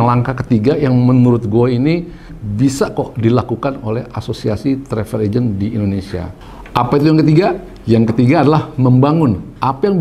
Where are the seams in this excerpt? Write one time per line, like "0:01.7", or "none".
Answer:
none